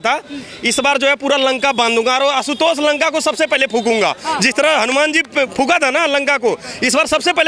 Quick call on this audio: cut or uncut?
uncut